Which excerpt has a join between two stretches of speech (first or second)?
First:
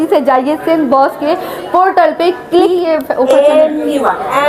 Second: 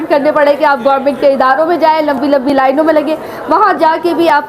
first